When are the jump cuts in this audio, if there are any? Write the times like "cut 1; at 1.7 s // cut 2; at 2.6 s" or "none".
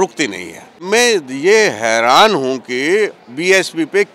cut 1; at 0.8 s // cut 2; at 3.3 s